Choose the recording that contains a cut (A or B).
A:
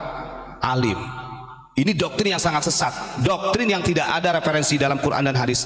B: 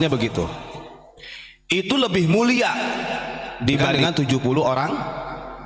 B